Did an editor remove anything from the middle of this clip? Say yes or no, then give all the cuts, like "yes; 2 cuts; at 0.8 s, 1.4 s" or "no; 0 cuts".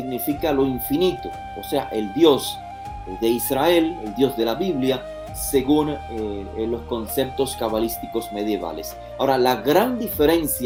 no; 0 cuts